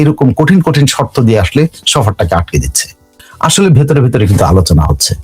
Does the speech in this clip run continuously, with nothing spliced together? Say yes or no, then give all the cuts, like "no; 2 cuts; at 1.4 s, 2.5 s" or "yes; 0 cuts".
no; 1 cut; at 3.3 s